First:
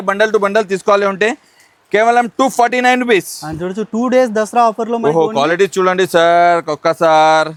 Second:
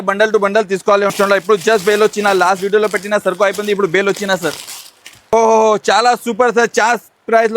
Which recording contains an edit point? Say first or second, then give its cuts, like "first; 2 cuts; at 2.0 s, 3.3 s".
second; 2 cuts; at 1.2 s, 5.3 s